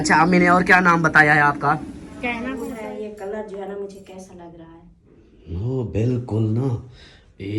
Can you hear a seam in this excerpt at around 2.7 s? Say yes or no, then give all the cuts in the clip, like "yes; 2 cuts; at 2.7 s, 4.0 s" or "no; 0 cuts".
yes; 1 cut; at 2.7 s